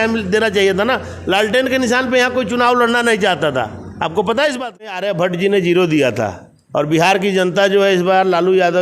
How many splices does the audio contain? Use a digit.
1